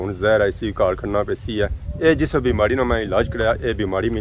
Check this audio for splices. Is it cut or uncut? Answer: cut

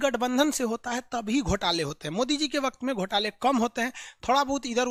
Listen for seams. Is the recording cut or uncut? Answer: uncut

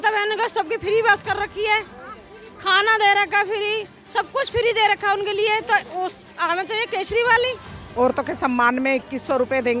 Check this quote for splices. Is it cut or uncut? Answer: cut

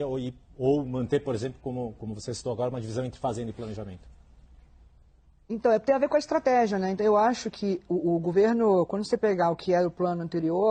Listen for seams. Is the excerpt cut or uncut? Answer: uncut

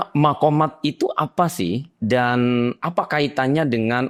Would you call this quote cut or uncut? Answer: uncut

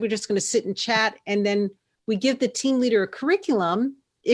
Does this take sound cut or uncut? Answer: uncut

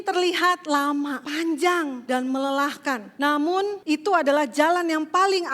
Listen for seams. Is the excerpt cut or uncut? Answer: cut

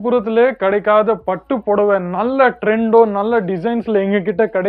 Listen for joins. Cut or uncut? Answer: uncut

